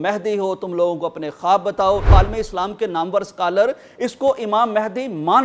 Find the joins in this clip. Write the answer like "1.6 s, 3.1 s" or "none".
2.1 s